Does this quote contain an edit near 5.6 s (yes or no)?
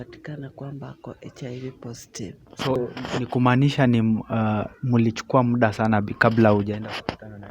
no